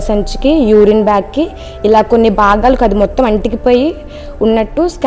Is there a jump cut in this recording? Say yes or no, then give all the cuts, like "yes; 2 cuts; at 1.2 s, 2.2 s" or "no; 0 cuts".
no; 0 cuts